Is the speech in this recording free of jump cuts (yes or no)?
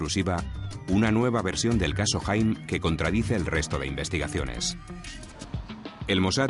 no